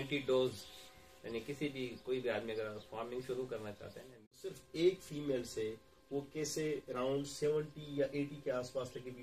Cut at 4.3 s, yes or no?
yes